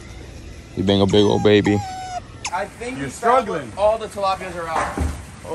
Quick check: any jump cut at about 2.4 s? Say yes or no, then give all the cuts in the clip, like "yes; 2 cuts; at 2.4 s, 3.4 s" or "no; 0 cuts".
yes; 1 cut; at 2.4 s